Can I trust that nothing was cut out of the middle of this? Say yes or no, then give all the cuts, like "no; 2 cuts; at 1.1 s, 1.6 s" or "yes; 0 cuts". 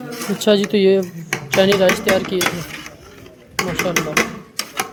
yes; 0 cuts